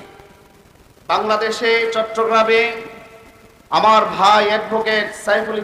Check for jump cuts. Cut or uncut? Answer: uncut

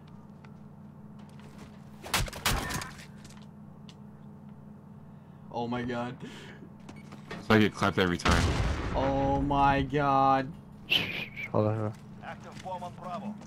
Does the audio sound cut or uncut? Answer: cut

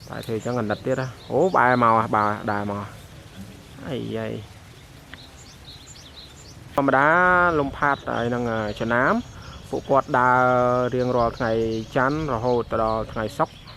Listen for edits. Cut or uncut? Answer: cut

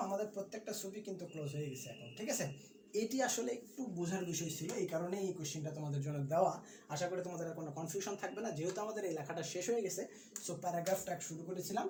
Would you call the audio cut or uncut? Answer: uncut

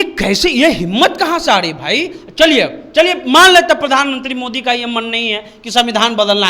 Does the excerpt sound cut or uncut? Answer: uncut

